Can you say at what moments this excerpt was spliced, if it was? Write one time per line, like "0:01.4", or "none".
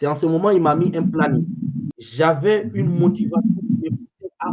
0:01.8